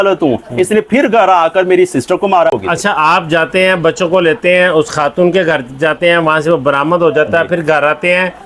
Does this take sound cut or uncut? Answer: uncut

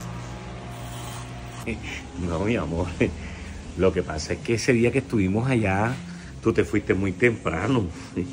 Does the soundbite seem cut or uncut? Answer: cut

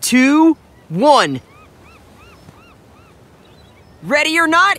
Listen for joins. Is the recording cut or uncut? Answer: cut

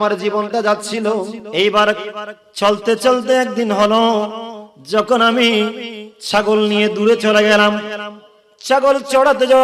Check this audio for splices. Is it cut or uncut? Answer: cut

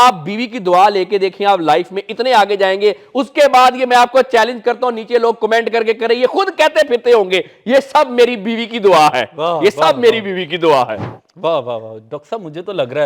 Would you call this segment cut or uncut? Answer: uncut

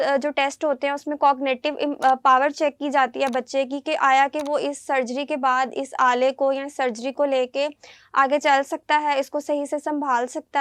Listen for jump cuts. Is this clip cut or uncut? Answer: uncut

